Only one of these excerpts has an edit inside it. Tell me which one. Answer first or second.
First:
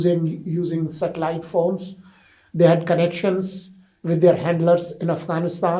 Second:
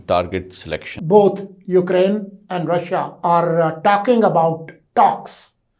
second